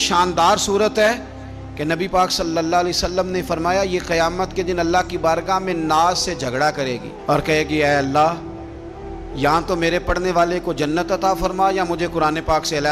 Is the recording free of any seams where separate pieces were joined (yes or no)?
yes